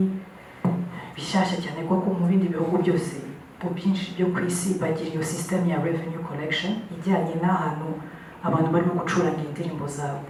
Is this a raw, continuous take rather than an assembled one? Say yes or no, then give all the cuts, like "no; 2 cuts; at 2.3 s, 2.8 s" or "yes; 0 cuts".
yes; 0 cuts